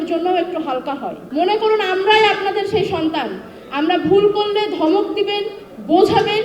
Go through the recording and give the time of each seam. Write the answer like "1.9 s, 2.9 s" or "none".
1.2 s